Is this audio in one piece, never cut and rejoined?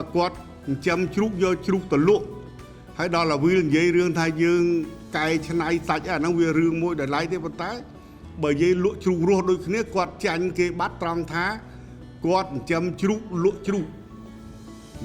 yes; 0 cuts

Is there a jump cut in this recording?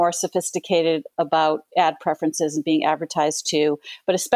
no; 0 cuts

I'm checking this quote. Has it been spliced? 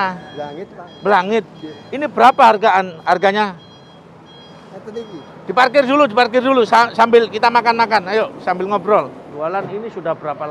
yes; 1 cut; at 9.2 s

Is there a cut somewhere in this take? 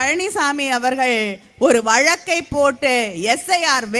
no; 0 cuts

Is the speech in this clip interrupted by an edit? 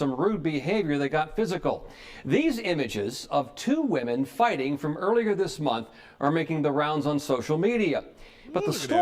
yes; 1 cut; at 1.0 s

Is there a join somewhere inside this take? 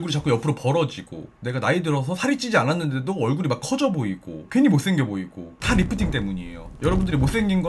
yes; 1 cut; at 6.7 s

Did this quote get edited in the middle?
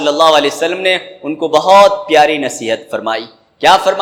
no; 0 cuts

